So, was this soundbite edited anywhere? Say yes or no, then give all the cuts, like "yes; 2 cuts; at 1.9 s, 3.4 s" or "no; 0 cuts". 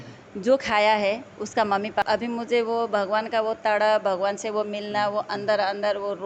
yes; 1 cut; at 2.0 s